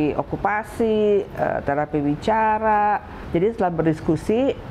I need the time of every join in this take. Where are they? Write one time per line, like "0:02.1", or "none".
0:03.1